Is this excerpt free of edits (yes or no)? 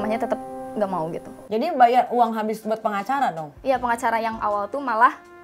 no